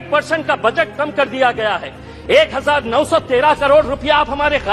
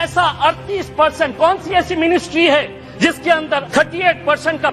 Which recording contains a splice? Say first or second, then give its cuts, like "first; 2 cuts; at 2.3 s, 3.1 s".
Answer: second; 1 cut; at 3.2 s